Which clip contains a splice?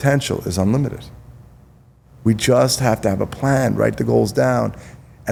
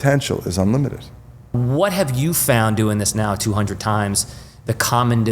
second; 1 cut; at 1.6 s

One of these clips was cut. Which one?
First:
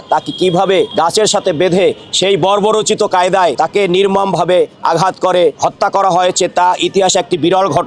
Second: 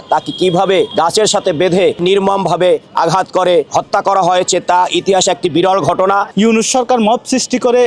second; 2 cuts; at 2.0 s, 6.3 s

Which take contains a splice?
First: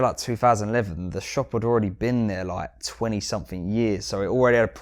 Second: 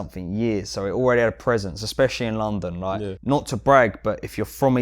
second; 1 cut; at 3.1 s

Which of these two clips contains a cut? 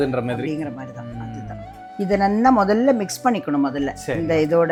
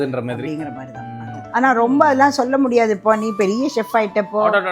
second; 1 cut; at 1.4 s

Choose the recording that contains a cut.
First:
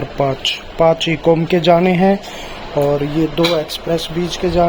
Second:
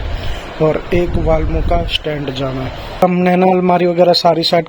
second; 1 cut; at 3.0 s

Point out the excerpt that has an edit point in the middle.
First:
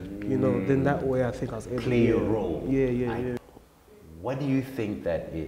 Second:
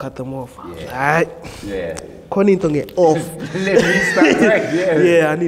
first; 1 cut; at 3.4 s

